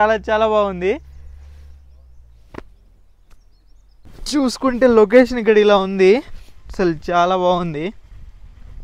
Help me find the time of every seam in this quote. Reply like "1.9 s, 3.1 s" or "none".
none